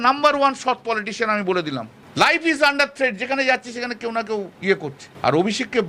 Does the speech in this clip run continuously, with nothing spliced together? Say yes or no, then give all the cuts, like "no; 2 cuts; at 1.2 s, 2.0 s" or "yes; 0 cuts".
no; 2 cuts; at 2.0 s, 4.7 s